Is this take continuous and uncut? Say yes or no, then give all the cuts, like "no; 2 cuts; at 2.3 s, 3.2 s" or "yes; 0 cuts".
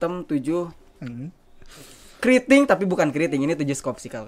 yes; 0 cuts